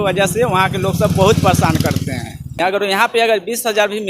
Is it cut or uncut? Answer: cut